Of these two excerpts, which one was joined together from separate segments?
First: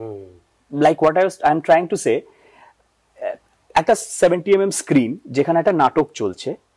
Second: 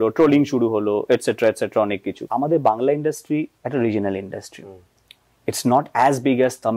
second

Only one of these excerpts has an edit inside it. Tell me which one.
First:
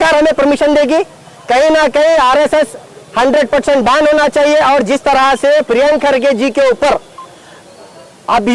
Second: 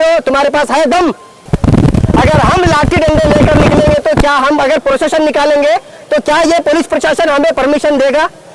second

